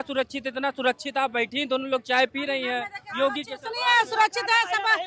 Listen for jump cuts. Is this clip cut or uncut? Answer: uncut